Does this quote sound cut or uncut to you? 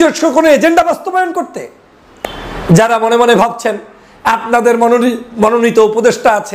cut